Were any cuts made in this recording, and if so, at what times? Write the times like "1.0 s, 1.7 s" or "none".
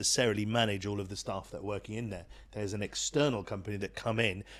none